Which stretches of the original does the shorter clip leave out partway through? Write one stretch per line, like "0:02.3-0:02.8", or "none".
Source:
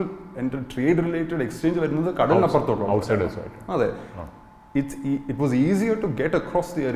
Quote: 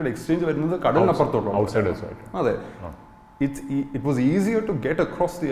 none